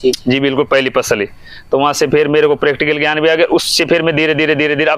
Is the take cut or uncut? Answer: uncut